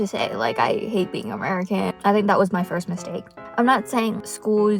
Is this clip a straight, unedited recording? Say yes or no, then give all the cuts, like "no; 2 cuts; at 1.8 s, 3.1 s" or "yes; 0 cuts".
no; 2 cuts; at 1.9 s, 3.4 s